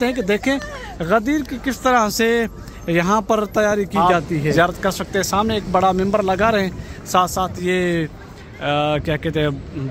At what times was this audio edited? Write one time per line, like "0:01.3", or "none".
0:04.5